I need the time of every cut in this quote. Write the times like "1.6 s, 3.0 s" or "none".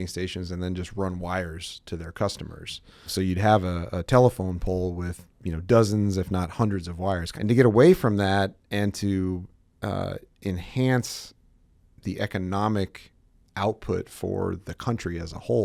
none